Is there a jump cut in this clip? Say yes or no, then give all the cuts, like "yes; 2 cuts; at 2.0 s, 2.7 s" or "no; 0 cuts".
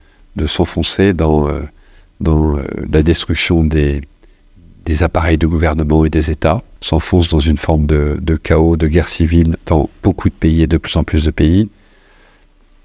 yes; 1 cut; at 6.7 s